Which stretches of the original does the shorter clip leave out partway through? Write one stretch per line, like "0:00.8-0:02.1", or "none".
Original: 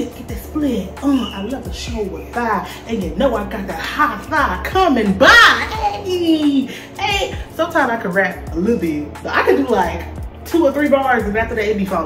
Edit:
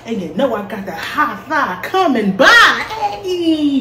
none